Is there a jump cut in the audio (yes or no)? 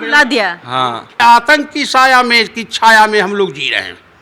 yes